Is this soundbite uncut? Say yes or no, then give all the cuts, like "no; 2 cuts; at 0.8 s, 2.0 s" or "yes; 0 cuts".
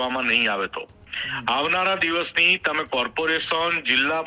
yes; 0 cuts